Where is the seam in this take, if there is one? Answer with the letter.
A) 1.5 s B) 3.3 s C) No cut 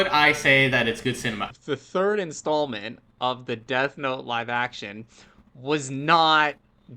A